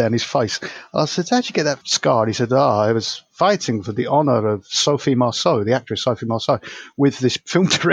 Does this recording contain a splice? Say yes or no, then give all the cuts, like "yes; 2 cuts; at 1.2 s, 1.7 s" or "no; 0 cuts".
yes; 1 cut; at 1.9 s